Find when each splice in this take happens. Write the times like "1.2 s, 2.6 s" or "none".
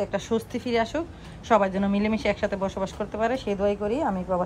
none

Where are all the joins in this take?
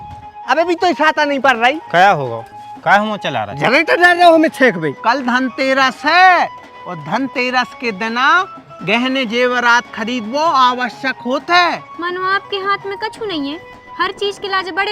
4.9 s, 11.9 s

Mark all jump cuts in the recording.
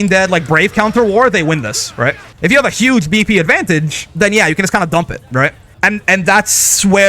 2.2 s, 5.6 s

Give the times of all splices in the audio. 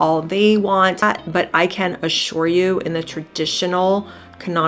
1.0 s

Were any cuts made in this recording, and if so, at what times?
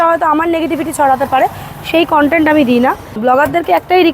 3.2 s

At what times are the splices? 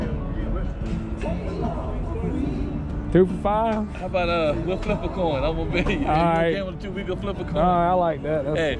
none

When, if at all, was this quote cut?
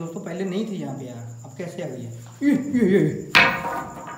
none

